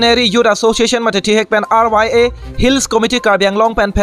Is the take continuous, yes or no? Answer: yes